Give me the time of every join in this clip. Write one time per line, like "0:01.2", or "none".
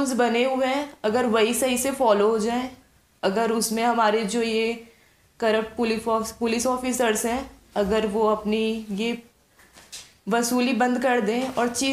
none